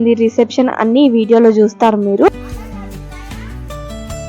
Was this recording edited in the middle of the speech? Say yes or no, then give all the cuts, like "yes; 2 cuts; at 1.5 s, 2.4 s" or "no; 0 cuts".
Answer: yes; 1 cut; at 2.3 s